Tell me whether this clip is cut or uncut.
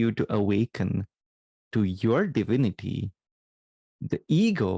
uncut